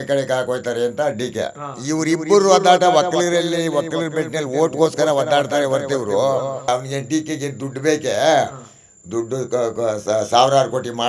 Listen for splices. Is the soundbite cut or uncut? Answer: cut